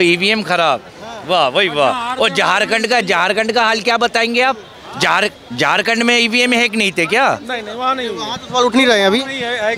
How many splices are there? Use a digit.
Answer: 0